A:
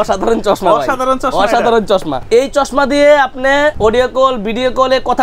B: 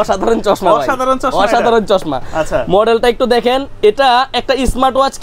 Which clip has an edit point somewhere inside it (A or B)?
A